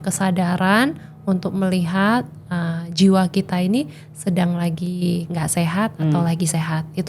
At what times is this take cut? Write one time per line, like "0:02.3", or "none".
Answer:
none